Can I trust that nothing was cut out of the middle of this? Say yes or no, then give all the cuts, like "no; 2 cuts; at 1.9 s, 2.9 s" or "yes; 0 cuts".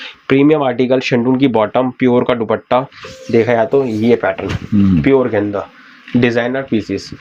yes; 0 cuts